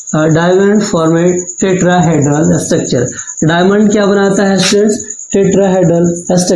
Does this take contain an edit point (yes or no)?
no